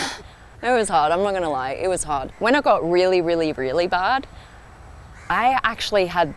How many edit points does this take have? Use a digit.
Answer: 1